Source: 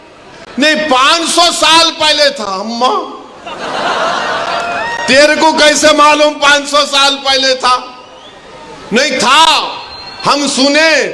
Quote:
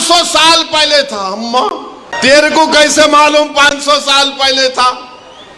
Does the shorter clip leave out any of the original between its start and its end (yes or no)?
yes